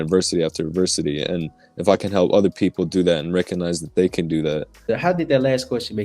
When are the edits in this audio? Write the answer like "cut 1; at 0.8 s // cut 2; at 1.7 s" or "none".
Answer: cut 1; at 4.8 s